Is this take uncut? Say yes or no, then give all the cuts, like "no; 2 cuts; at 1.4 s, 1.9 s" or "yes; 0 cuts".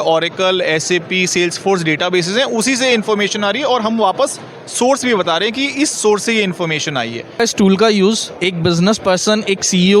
no; 1 cut; at 7.4 s